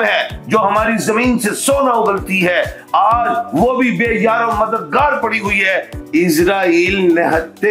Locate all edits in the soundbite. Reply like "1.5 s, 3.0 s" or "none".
5.9 s